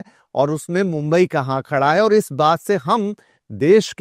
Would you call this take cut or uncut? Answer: uncut